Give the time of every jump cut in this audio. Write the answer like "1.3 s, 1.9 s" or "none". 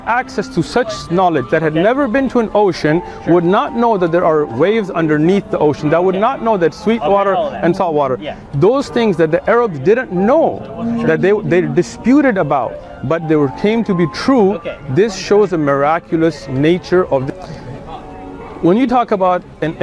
17.2 s